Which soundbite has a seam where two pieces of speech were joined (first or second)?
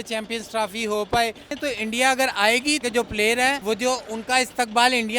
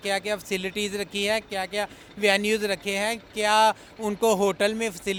first